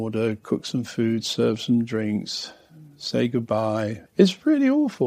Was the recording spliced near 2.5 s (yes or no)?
no